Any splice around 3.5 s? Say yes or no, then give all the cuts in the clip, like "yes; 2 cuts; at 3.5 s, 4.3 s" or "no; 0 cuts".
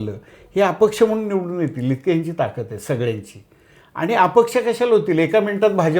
no; 0 cuts